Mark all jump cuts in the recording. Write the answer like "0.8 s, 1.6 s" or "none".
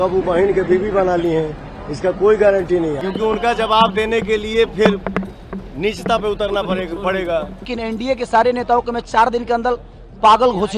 3.0 s, 7.7 s